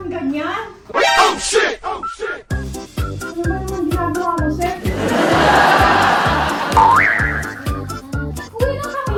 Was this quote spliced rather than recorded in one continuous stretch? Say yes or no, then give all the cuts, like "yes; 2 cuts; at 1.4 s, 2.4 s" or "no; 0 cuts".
no; 0 cuts